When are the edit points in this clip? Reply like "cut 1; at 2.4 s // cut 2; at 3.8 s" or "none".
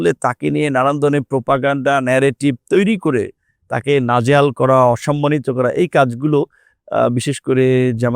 none